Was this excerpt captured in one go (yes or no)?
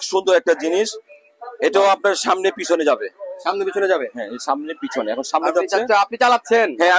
yes